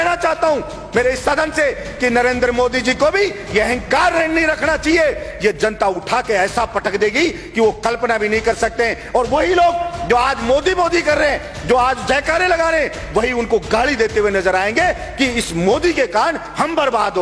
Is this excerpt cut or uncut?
uncut